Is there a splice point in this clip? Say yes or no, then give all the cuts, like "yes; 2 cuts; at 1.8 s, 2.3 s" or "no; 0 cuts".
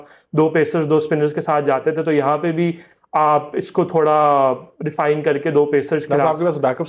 no; 0 cuts